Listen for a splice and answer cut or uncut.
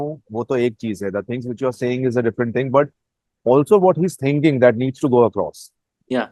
uncut